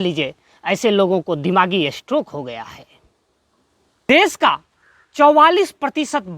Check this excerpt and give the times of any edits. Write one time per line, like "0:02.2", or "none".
0:04.0